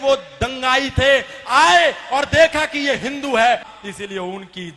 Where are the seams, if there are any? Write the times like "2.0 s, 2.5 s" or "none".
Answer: 3.7 s